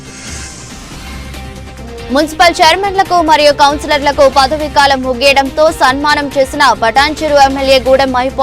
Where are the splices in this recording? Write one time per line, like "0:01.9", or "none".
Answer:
0:01.2